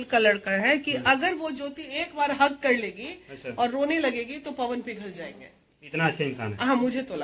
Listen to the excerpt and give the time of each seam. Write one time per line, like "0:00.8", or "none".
none